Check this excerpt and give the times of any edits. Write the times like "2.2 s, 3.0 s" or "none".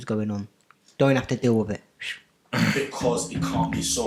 none